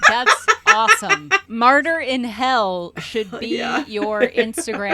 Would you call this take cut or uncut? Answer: cut